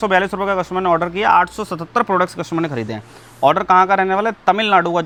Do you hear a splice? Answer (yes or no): no